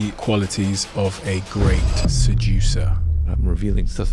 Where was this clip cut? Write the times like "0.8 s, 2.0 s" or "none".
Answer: none